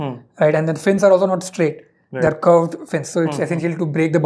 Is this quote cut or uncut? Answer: uncut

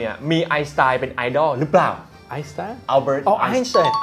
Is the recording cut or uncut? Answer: uncut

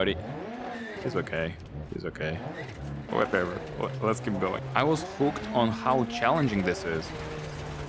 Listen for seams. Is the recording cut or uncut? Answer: uncut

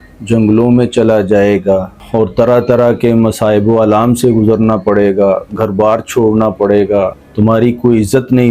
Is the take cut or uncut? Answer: cut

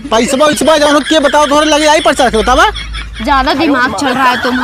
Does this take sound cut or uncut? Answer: uncut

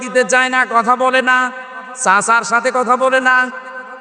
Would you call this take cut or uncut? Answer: uncut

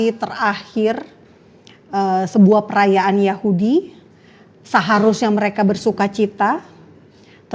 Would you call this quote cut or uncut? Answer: uncut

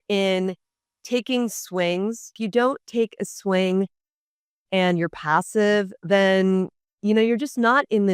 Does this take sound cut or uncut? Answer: cut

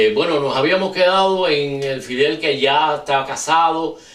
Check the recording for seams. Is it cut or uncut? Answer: uncut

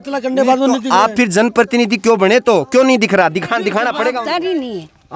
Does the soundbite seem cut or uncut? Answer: cut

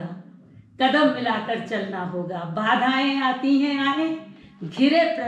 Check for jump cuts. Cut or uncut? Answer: uncut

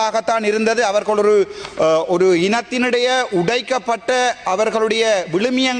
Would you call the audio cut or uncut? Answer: uncut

